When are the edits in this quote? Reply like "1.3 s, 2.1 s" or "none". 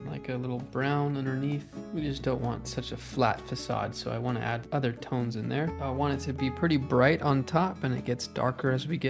1.8 s, 4.6 s, 5.8 s

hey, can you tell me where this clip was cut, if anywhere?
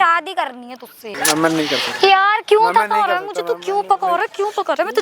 1.1 s

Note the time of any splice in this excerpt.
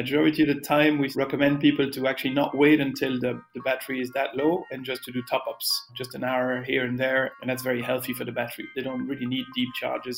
1.1 s, 5.9 s, 7.3 s, 8.7 s

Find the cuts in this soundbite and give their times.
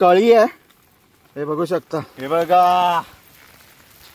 2.1 s

